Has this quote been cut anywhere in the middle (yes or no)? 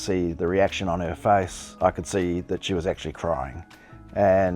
yes